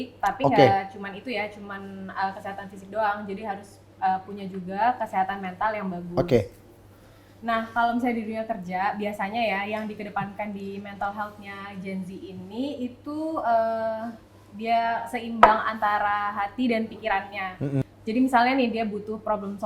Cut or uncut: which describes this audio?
cut